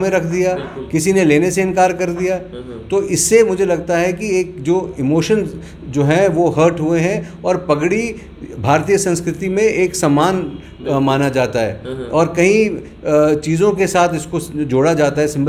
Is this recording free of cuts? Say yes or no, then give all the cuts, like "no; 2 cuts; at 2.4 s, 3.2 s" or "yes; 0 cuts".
yes; 0 cuts